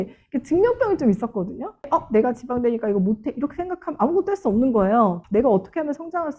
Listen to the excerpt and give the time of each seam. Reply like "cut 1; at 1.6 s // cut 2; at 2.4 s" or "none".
cut 1; at 1.9 s